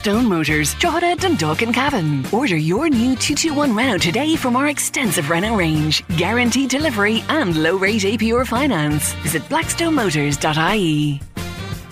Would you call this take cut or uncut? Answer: uncut